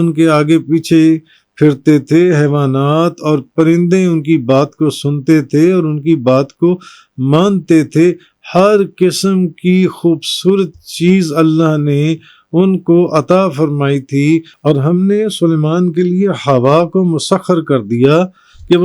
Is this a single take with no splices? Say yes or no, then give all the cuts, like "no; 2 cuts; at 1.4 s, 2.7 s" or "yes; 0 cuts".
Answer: no; 1 cut; at 14.5 s